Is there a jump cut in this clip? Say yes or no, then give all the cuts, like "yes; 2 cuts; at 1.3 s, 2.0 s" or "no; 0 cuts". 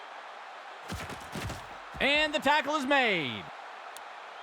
no; 0 cuts